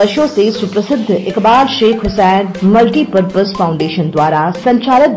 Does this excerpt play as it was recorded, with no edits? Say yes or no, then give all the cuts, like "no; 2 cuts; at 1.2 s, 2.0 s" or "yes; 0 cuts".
yes; 0 cuts